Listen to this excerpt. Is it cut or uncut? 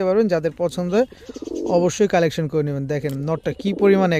uncut